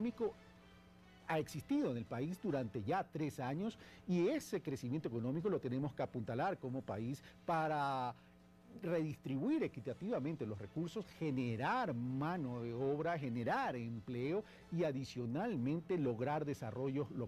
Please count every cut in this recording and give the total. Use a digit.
0